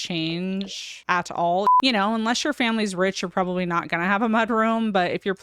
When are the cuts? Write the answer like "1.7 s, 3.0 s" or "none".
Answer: 1.7 s